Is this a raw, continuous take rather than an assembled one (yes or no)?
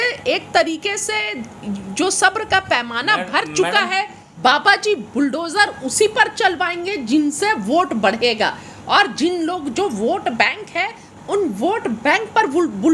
no